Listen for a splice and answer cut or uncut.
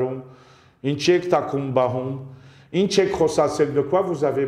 uncut